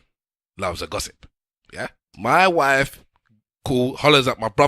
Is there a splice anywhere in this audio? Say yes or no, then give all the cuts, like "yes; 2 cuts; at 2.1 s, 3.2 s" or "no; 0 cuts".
yes; 1 cut; at 2.0 s